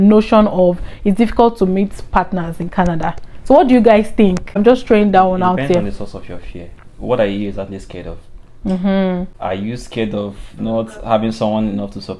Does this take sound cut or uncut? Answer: uncut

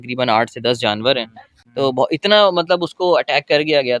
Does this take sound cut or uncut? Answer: cut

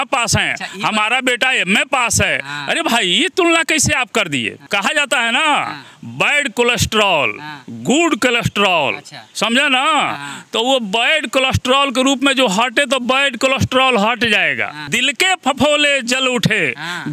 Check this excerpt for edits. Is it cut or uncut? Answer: cut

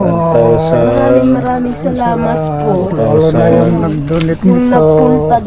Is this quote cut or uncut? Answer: uncut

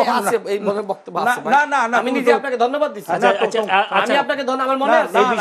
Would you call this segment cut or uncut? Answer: uncut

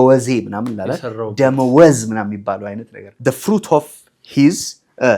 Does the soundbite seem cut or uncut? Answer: cut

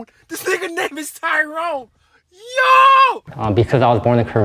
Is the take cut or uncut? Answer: cut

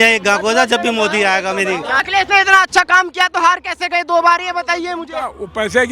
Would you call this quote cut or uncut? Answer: cut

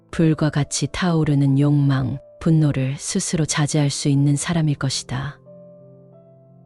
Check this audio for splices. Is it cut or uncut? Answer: cut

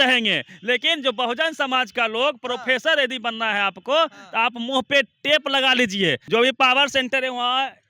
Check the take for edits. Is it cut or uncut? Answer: cut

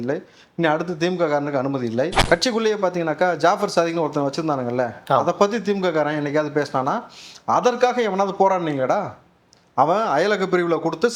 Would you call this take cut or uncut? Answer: cut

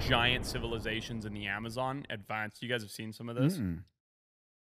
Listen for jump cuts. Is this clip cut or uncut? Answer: uncut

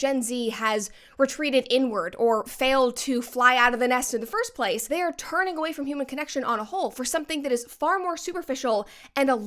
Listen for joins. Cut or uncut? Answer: cut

